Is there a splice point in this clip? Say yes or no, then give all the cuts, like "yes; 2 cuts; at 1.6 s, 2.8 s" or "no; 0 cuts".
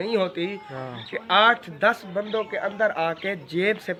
no; 0 cuts